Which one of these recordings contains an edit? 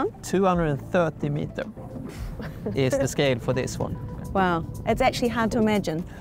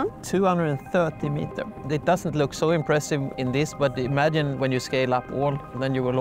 second; 3 cuts; at 1.8 s, 3.3 s, 4.5 s

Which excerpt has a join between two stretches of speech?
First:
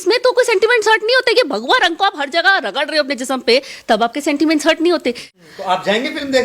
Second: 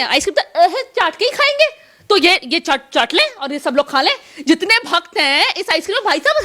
first; 1 cut; at 5.2 s

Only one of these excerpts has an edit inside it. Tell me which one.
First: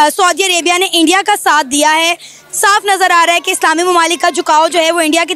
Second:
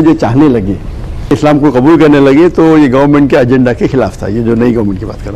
second; 1 cut; at 1.3 s

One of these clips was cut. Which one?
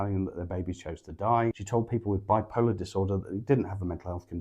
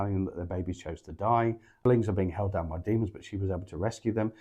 first; 1 cut; at 1.6 s

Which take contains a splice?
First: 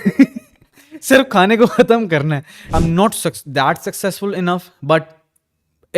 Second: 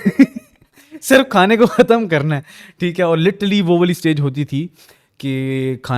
first; 1 cut; at 2.7 s

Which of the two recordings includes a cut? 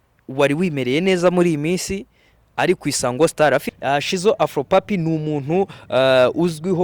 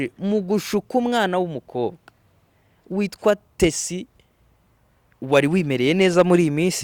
first; 1 cut; at 3.7 s

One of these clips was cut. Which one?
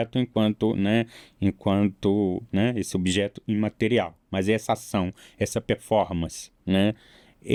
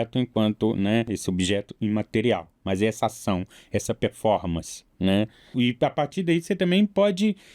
second; 2 cuts; at 1.1 s, 5.5 s

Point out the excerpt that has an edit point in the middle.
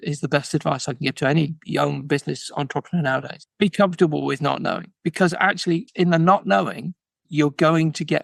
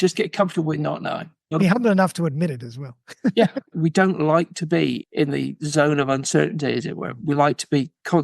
second; 1 cut; at 1.4 s

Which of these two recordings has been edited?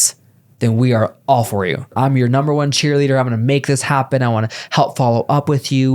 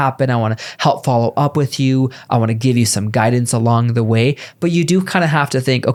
first; 1 cut; at 1.9 s

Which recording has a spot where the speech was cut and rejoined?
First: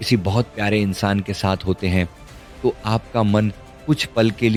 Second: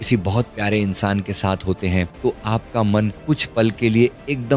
second; 2 cuts; at 2.1 s, 3.2 s

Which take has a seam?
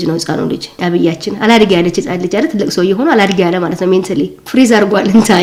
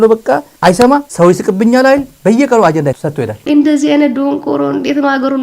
second; 3 cuts; at 1.1 s, 2.1 s, 3.4 s

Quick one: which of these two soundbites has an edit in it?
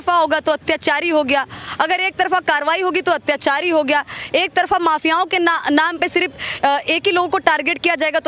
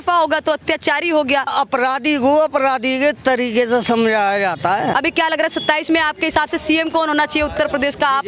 second; 2 cuts; at 1.5 s, 4.9 s

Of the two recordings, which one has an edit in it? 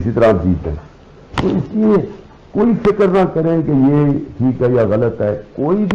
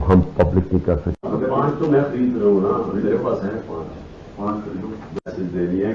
second; 1 cut; at 1.2 s

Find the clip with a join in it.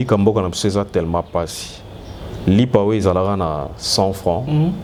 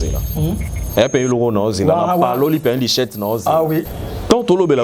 second; 1 cut; at 3.9 s

